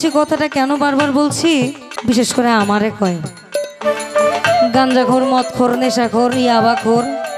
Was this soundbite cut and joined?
yes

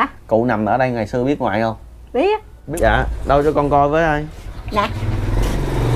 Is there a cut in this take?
yes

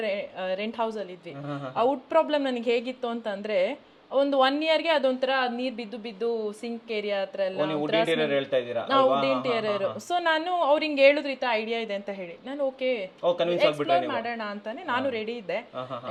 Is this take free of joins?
yes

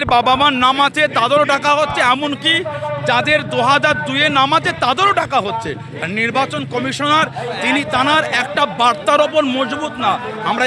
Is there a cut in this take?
no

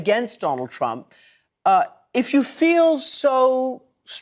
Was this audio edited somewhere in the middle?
no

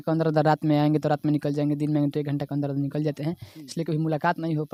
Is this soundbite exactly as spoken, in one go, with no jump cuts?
yes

